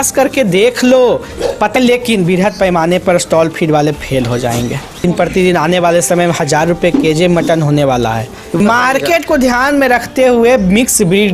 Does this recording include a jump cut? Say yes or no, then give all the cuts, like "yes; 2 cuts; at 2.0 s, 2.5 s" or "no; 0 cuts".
yes; 3 cuts; at 1.7 s, 5.0 s, 8.6 s